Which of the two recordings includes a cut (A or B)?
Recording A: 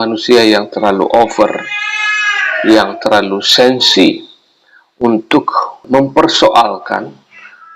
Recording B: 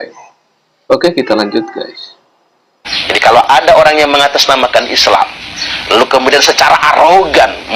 A